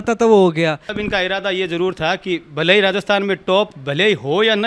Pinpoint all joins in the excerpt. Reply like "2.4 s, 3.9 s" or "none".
0.9 s